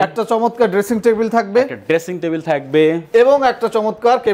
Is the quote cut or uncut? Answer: uncut